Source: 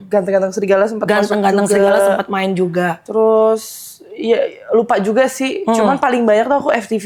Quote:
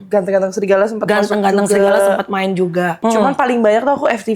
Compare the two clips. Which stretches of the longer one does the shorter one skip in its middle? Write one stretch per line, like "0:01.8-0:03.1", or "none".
0:03.0-0:05.6